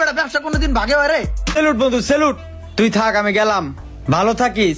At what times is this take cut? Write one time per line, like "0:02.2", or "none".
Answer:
0:01.5